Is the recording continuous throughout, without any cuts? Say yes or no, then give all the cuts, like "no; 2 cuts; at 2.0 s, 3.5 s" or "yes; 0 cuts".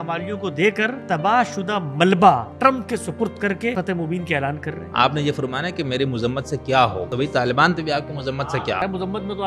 no; 6 cuts; at 1.0 s, 2.5 s, 3.7 s, 4.8 s, 7.0 s, 8.4 s